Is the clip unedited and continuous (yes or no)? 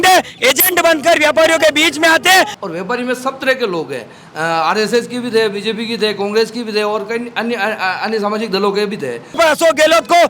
no